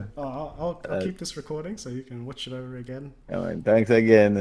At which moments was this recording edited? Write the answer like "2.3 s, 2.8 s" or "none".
3.1 s